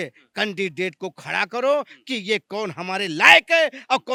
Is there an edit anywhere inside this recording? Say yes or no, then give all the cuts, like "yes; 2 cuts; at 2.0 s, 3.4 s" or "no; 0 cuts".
no; 0 cuts